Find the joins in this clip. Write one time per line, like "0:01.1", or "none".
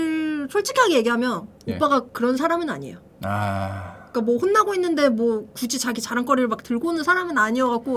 none